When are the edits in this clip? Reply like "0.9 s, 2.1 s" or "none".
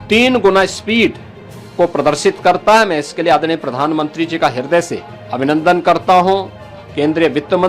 5.1 s